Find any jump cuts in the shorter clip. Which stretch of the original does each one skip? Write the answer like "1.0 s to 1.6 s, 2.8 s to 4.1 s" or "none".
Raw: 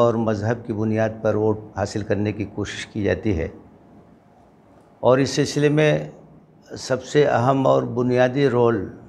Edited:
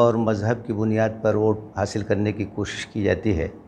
none